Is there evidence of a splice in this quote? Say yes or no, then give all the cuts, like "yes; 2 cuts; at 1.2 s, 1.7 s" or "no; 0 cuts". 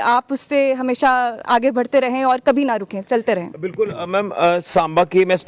no; 0 cuts